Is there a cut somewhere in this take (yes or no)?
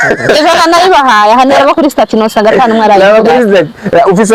no